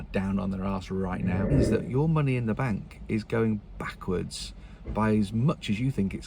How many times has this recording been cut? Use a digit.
1